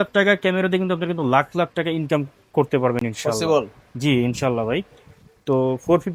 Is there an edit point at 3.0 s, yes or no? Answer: no